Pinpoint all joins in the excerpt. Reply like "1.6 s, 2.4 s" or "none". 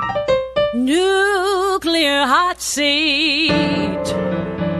none

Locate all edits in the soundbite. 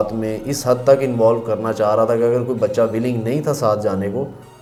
none

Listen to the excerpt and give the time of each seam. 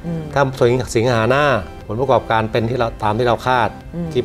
1.8 s

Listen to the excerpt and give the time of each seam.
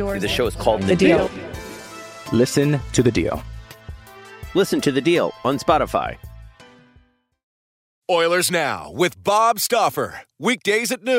7.9 s

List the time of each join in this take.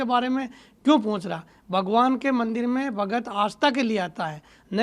none

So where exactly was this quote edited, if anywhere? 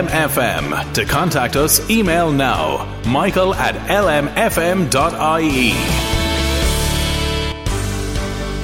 7.6 s

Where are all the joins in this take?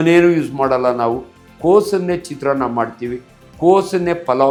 none

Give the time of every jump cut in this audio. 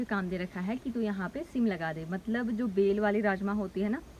none

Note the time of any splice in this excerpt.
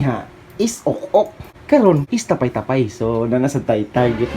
none

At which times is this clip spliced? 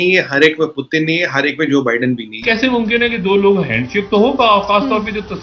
2.3 s

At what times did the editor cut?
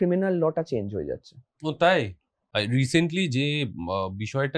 2.4 s

